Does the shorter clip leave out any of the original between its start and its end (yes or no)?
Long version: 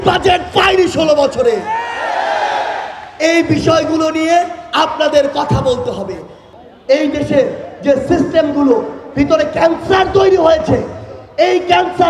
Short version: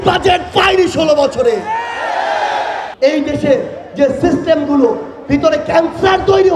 yes